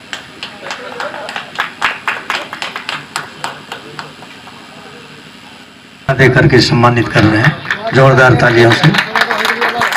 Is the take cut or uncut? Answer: cut